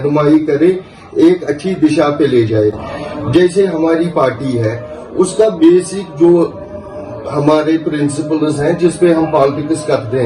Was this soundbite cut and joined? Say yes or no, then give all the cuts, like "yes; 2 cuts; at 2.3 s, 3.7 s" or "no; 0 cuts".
no; 0 cuts